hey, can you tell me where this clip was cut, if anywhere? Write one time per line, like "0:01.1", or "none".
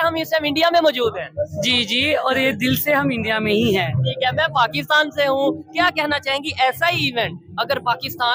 none